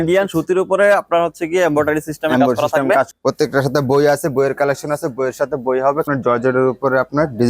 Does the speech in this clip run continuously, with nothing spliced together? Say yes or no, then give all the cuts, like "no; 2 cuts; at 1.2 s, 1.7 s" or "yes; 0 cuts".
no; 2 cuts; at 3.1 s, 6.0 s